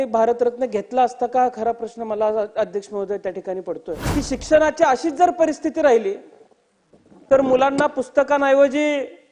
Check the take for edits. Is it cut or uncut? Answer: cut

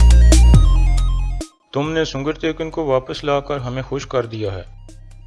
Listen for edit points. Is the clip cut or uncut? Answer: cut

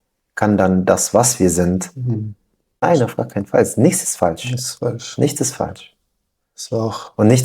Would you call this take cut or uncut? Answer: cut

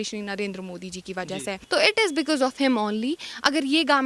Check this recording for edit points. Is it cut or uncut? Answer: cut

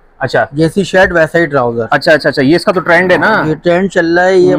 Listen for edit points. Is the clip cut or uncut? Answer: uncut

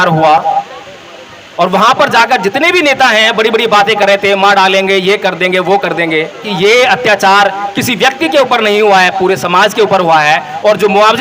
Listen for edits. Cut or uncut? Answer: cut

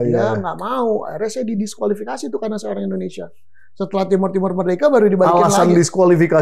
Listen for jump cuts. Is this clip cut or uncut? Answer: uncut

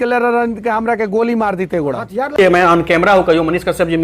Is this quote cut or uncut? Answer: cut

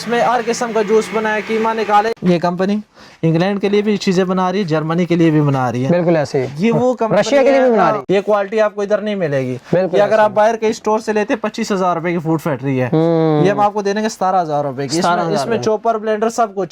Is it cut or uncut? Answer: uncut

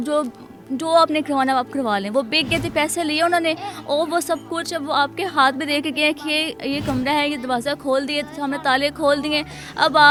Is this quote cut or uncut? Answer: uncut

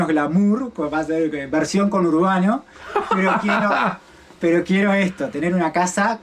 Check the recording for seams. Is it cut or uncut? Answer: uncut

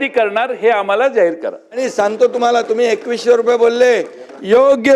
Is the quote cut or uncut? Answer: cut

